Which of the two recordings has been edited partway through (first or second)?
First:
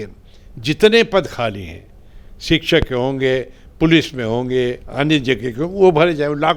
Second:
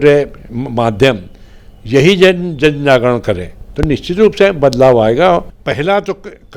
second